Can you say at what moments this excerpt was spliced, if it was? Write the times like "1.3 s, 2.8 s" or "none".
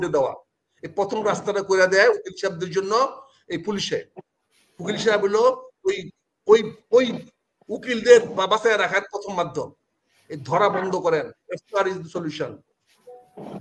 none